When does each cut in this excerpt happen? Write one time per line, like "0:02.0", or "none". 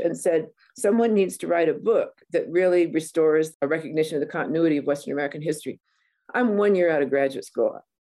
0:03.5